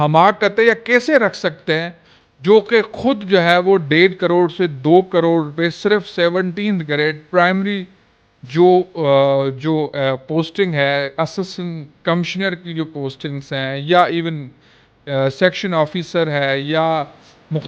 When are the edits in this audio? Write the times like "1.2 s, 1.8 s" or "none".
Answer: none